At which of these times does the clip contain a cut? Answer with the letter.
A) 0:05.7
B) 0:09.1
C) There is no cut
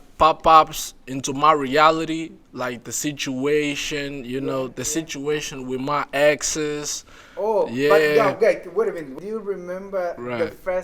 B